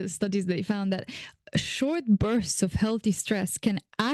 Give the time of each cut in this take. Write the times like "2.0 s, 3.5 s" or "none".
none